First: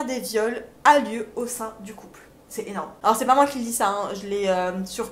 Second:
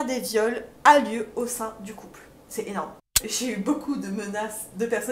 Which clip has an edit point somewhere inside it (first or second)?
second